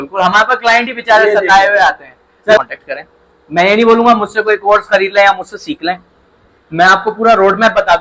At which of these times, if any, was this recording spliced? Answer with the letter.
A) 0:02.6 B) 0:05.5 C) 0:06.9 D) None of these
A